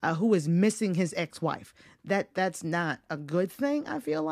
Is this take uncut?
yes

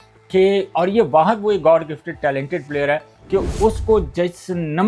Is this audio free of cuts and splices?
yes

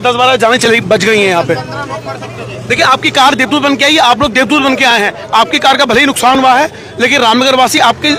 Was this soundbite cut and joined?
no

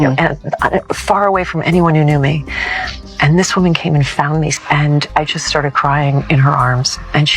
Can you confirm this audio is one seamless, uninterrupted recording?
no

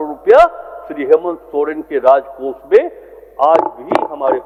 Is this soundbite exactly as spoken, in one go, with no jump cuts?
yes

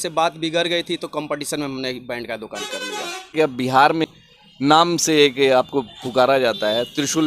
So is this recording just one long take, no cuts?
no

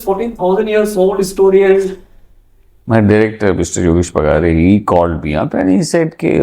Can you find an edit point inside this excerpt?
no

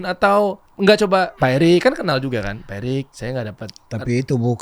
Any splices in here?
yes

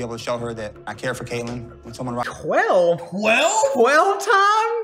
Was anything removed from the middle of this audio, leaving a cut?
no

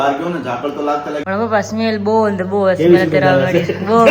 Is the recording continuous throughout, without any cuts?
no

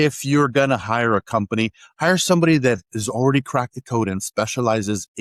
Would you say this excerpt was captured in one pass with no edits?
yes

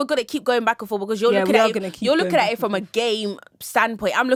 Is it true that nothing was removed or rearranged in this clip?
yes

